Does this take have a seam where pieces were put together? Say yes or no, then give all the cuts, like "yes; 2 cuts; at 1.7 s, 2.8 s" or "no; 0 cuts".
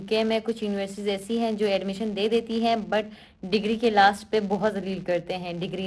no; 0 cuts